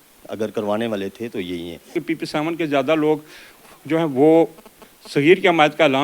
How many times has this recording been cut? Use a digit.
1